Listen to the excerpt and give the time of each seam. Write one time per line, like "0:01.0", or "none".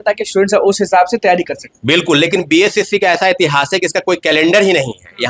none